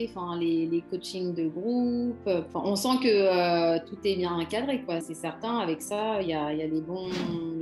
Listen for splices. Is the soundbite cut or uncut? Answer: cut